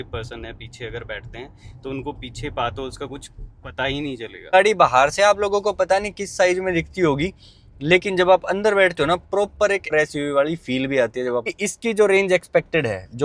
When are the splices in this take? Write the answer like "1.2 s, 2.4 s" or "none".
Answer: 4.5 s, 9.9 s, 11.4 s

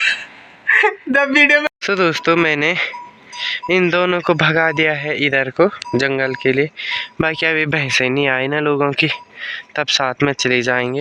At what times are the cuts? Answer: 1.7 s

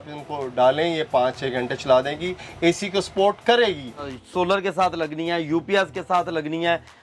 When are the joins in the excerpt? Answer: 4.1 s

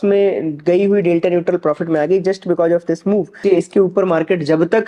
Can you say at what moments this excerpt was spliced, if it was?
3.4 s

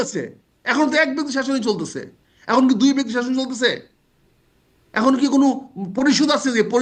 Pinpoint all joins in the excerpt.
none

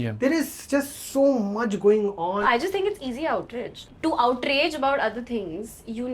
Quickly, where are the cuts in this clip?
2.4 s, 3.8 s

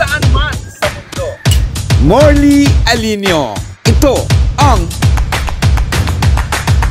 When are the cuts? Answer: none

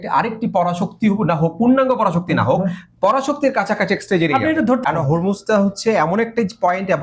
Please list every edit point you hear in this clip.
4.8 s

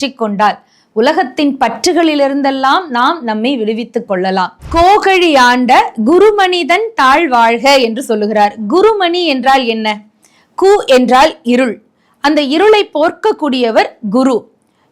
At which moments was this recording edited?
4.6 s

